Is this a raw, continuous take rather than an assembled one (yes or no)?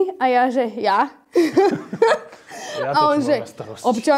yes